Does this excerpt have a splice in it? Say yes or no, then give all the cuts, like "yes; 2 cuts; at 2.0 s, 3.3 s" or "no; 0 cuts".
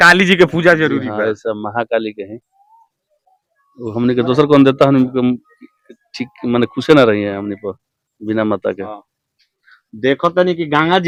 no; 0 cuts